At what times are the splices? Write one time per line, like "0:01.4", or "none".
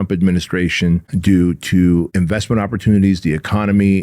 0:01.1
0:02.1